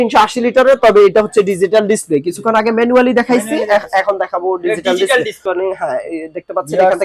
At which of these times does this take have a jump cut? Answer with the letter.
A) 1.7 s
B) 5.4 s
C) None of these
B